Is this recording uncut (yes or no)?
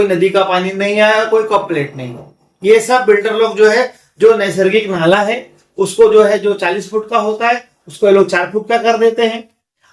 yes